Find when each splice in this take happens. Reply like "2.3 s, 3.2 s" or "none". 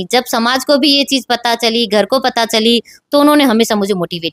none